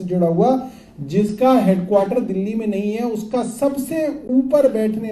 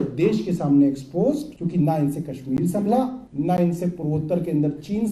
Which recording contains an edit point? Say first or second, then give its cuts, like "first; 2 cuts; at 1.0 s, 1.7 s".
second; 2 cuts; at 1.5 s, 3.2 s